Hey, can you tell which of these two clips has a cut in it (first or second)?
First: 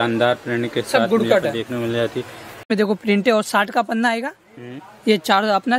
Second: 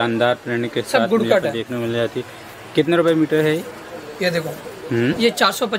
first